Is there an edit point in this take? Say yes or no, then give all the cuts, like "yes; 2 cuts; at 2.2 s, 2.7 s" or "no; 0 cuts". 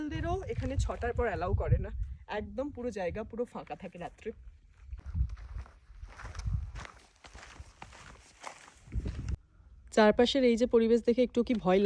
no; 0 cuts